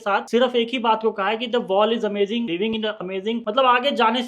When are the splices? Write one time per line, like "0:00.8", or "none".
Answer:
0:02.5